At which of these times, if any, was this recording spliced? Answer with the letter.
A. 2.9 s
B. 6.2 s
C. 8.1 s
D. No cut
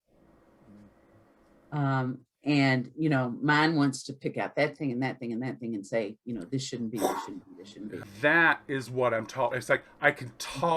C